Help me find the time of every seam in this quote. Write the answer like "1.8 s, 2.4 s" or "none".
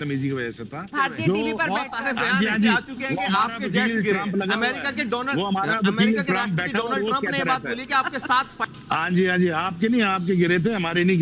0.9 s, 8.6 s

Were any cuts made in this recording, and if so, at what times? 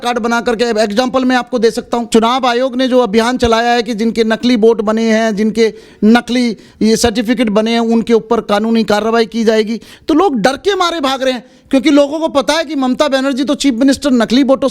2.0 s

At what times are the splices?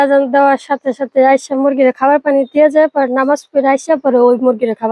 none

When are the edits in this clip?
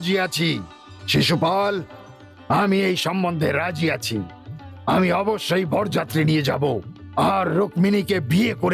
none

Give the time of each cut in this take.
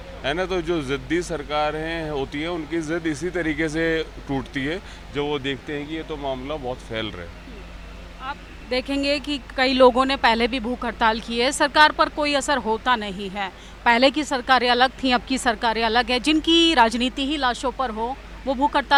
none

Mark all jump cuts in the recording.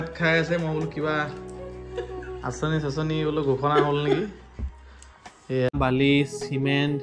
5.7 s

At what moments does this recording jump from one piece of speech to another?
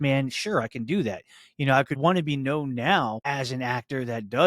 2.0 s, 3.2 s

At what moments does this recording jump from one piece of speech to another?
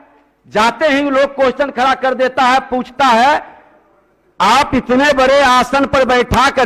none

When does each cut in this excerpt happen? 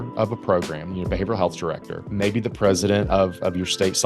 1.9 s

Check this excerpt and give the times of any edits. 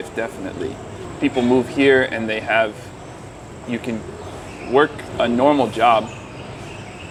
none

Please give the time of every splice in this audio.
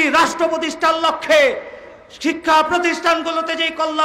none

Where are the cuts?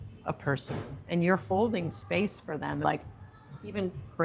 2.8 s

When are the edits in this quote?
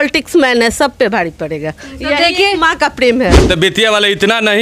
3.4 s

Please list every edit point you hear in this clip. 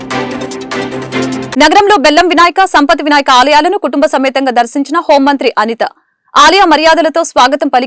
1.5 s

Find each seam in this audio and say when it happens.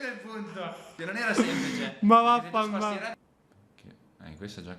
3.2 s

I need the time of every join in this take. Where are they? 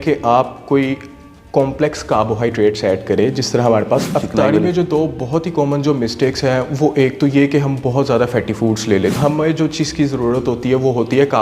4.1 s, 9.1 s

